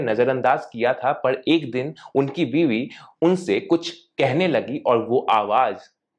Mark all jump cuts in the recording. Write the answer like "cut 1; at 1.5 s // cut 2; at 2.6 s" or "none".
none